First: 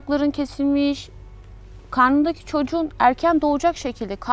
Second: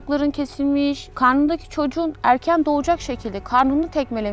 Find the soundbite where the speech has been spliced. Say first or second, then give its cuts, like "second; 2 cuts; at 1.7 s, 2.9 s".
second; 1 cut; at 1.1 s